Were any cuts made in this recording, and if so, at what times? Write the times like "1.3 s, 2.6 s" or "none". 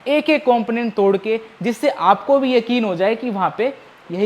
none